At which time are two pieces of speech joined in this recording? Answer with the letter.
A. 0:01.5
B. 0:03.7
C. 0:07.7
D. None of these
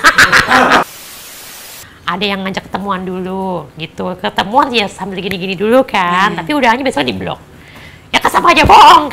A